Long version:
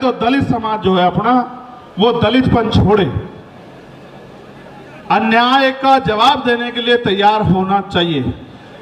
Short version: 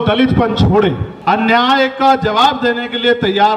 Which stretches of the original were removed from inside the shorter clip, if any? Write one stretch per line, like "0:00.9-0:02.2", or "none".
0:03.2-0:04.9